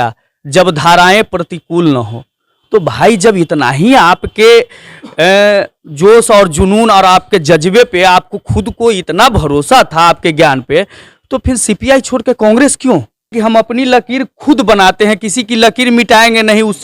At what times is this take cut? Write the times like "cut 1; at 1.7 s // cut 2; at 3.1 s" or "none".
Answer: cut 1; at 13.3 s